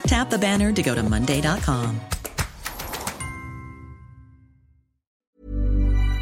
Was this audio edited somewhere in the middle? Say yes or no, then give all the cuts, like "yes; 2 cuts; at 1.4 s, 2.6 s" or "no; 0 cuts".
yes; 1 cut; at 5.3 s